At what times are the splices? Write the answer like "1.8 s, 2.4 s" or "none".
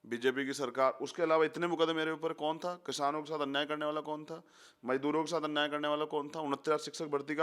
none